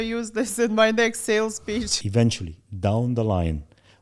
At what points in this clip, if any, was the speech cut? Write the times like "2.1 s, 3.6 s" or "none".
1.9 s